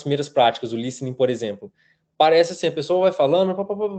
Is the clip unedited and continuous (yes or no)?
yes